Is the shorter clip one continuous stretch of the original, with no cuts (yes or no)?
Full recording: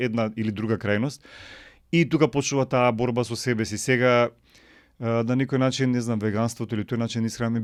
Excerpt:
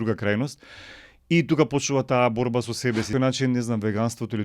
no